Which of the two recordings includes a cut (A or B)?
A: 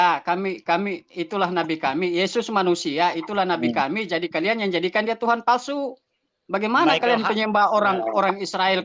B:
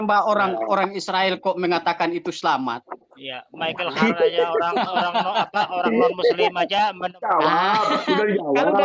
B